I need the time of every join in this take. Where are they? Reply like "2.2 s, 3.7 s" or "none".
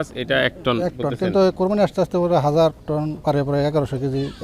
3.2 s